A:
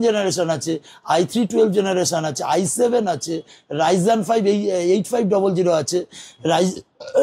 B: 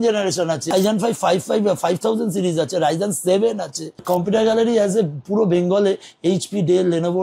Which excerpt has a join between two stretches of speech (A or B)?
B